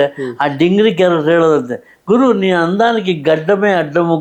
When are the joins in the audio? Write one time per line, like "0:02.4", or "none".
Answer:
none